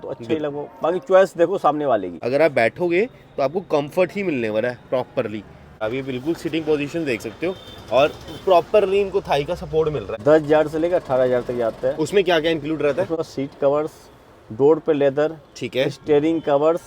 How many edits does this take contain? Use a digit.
4